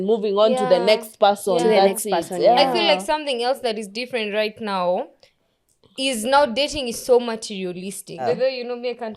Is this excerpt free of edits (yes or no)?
no